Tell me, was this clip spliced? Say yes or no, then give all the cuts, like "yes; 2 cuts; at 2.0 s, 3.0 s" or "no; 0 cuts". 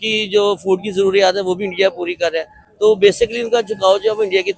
no; 0 cuts